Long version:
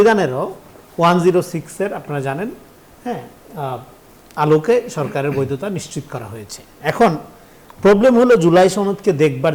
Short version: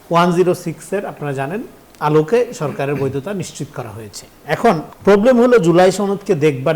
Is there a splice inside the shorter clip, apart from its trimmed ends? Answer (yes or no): yes